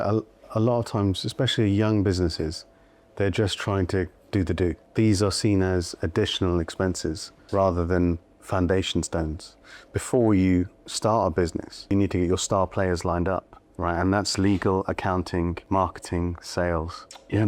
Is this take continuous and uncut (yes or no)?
no